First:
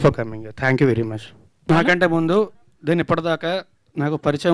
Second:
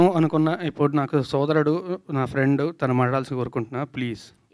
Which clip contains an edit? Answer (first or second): first